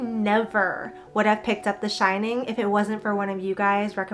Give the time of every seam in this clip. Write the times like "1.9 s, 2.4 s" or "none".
none